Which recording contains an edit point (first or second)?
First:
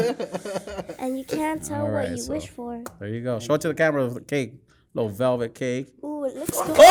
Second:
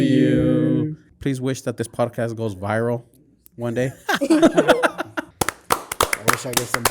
second